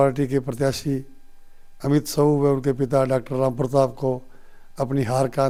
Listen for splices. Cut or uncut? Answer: uncut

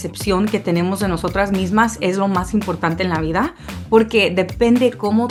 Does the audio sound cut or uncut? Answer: uncut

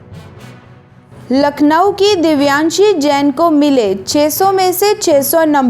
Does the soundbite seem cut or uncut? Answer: cut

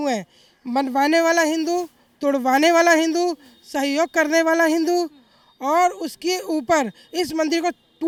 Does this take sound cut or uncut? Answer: uncut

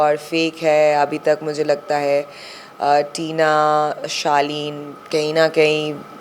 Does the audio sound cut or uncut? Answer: uncut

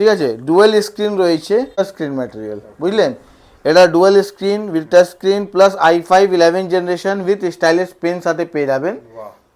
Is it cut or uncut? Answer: cut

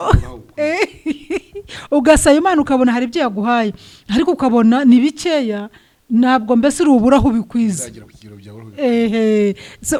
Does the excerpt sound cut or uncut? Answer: uncut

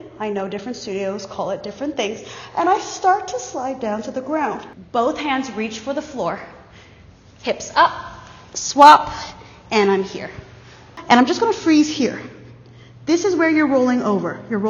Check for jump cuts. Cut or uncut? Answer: cut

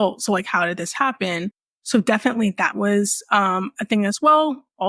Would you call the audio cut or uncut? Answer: uncut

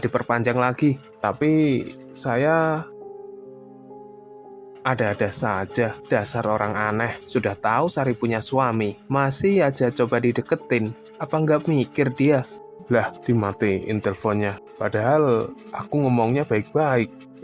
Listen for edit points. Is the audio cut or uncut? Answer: uncut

